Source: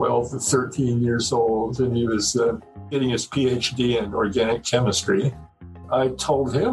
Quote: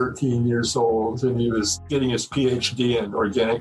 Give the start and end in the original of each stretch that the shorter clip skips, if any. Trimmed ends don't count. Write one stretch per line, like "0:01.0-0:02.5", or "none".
0:02.3-0:02.7